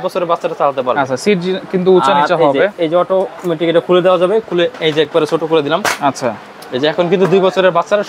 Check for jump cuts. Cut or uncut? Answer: uncut